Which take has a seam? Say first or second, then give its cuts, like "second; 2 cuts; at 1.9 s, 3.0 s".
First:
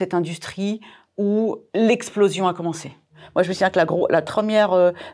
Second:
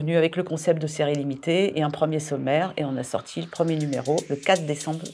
first; 3 cuts; at 1.6 s, 3.2 s, 4.3 s